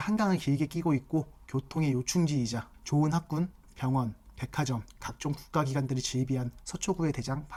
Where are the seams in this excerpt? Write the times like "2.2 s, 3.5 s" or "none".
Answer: none